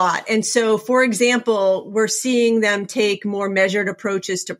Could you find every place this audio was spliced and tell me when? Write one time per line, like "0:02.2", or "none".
none